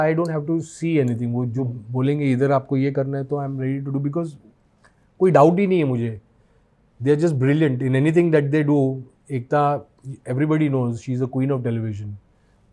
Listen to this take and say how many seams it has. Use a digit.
0